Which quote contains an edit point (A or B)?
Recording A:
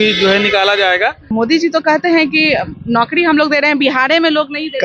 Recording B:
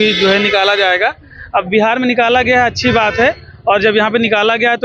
A